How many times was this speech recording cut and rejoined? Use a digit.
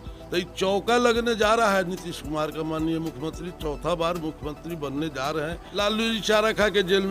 1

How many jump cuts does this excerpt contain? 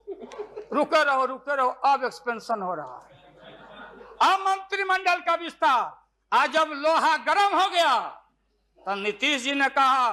0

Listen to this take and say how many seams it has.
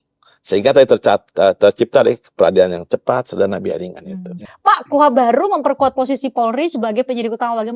1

